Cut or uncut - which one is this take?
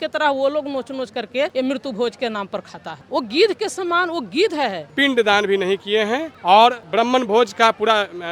cut